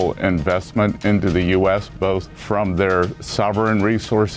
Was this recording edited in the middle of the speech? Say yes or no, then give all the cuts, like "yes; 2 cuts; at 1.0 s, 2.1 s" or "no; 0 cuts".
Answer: yes; 3 cuts; at 1.0 s, 2.4 s, 3.2 s